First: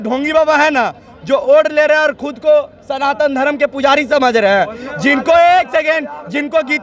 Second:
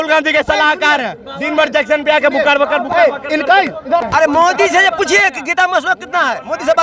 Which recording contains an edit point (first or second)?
second